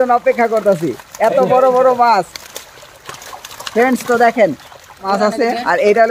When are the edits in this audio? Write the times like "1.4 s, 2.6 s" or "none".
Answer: 5.0 s